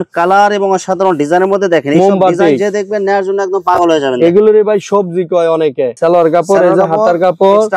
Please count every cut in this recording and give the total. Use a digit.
0